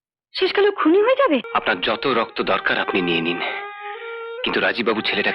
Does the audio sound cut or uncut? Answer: cut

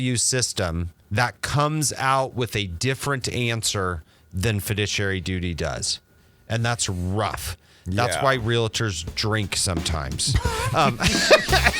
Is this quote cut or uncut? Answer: cut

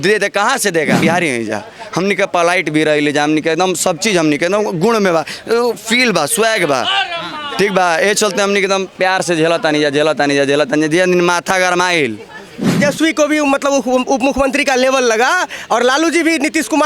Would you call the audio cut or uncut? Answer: cut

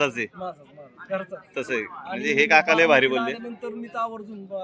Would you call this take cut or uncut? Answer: uncut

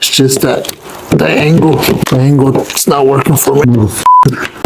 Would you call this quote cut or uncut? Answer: cut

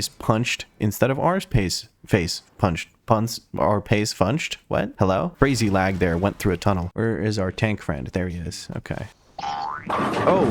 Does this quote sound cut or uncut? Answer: cut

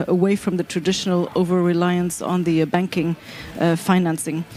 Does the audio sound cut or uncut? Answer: uncut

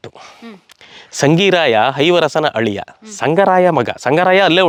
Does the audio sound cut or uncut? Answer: uncut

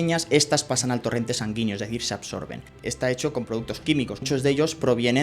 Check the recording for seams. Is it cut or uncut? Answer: cut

